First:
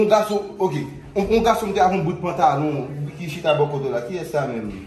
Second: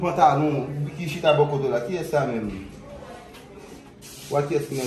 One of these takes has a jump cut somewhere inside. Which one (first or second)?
second